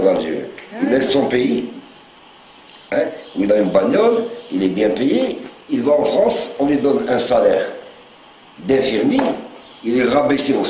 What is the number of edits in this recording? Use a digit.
1